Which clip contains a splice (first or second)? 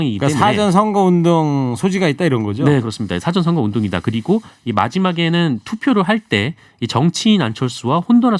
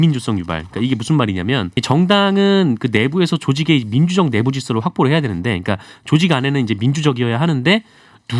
second